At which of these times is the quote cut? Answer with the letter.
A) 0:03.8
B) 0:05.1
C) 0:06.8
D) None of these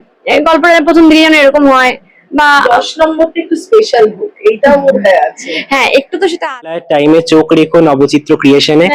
C